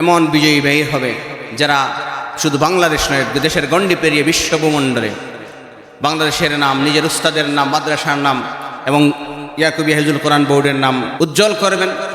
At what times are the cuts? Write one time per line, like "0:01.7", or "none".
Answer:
0:11.1